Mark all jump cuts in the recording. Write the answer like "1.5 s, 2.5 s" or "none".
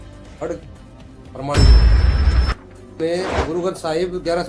none